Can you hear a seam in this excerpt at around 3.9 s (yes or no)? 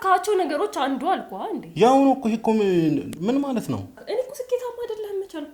yes